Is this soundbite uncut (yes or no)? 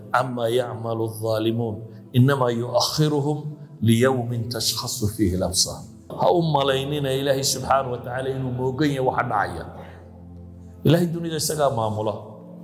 no